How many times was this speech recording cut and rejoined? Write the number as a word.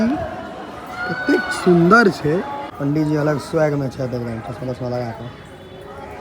one